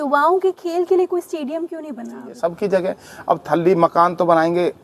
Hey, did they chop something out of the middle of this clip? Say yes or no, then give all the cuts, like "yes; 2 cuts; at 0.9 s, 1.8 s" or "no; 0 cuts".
yes; 1 cut; at 2.3 s